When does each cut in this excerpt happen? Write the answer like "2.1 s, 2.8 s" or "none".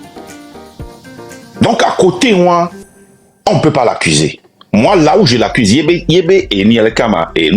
1.3 s